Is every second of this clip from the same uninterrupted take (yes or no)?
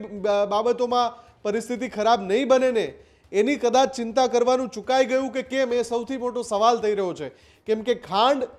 yes